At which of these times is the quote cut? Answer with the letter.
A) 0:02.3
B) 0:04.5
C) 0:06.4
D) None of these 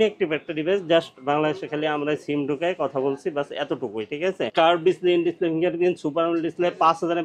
B